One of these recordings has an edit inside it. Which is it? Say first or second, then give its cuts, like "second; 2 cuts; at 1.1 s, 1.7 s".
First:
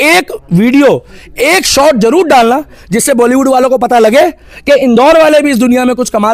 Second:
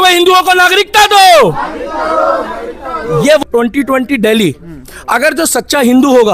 second; 1 cut; at 3.4 s